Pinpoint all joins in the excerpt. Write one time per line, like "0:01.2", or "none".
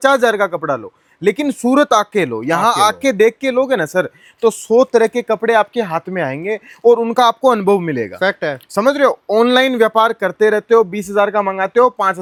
none

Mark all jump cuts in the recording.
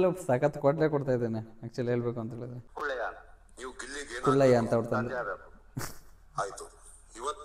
0:02.5

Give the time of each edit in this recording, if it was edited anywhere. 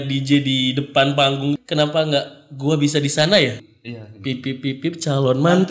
0:01.6
0:03.7

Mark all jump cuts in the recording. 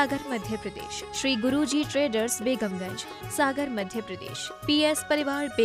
none

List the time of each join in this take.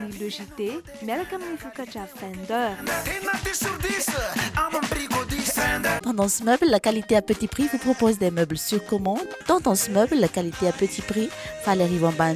0:06.0

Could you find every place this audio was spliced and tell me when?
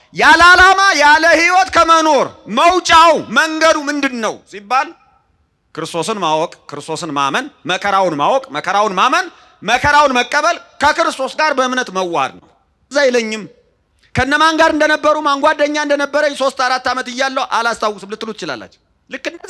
0:12.8

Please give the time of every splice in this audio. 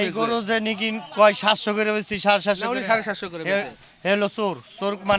none

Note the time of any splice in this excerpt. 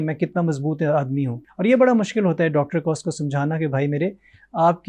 0:01.4

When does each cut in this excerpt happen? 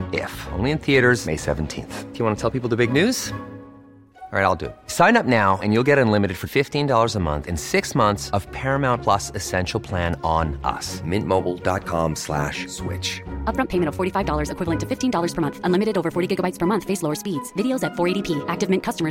none

